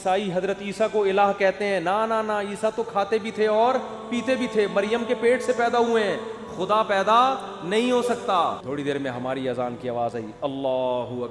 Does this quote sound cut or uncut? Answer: cut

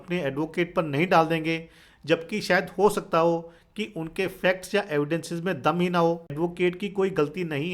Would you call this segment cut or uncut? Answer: cut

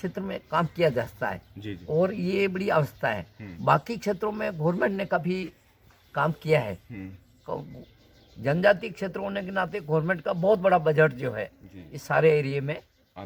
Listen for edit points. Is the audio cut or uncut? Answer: uncut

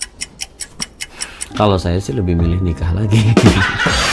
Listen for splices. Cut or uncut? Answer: uncut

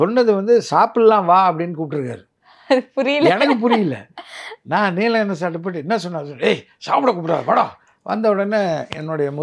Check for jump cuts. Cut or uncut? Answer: cut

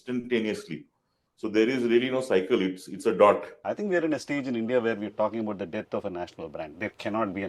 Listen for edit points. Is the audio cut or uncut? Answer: cut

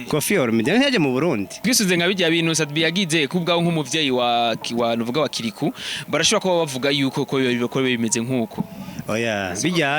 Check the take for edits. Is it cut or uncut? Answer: cut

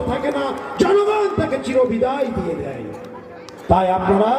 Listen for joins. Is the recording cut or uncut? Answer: uncut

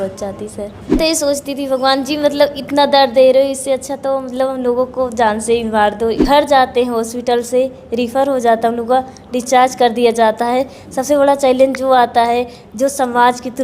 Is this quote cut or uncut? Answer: cut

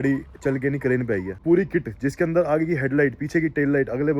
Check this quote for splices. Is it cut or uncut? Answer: cut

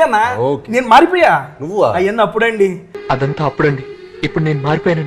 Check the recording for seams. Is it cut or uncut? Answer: uncut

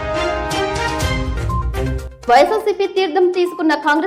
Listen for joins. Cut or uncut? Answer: uncut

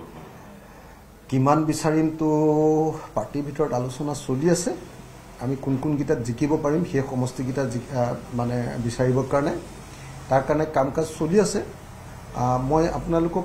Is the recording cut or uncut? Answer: uncut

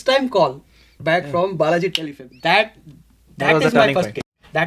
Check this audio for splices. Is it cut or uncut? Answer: uncut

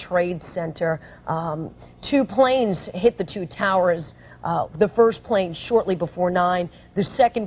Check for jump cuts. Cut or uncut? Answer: cut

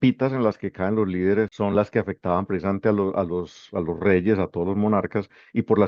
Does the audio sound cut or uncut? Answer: cut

